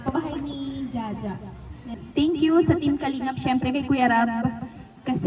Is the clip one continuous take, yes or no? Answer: no